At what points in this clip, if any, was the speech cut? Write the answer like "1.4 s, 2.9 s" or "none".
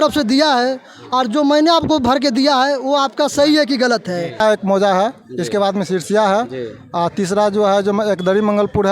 4.4 s